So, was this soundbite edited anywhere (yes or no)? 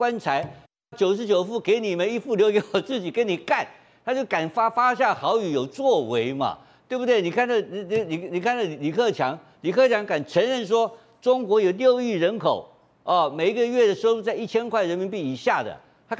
no